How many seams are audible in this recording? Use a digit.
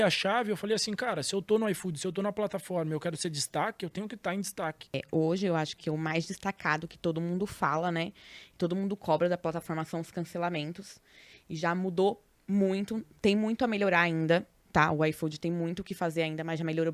1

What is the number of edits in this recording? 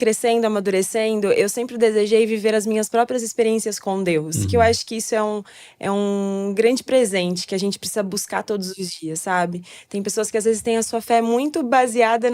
0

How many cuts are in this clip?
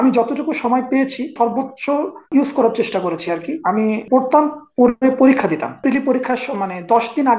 3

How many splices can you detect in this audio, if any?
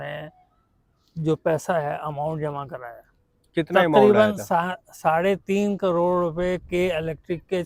0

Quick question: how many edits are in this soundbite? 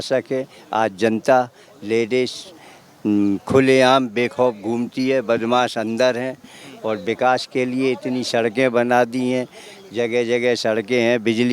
0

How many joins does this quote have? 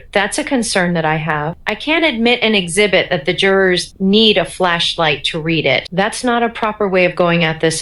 2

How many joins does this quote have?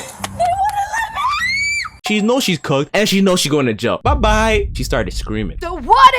1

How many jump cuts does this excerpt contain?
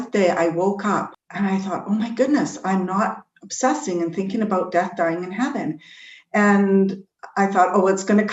1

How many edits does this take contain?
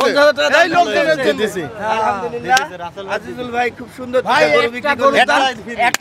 0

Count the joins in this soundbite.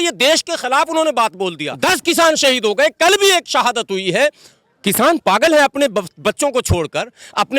1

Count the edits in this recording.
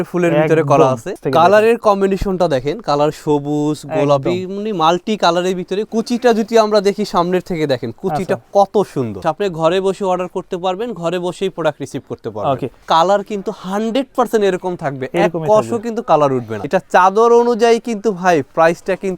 5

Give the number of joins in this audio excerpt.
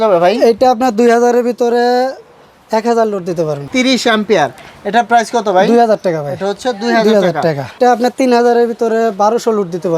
2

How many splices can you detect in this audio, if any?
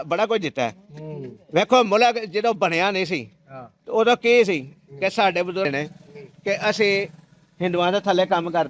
0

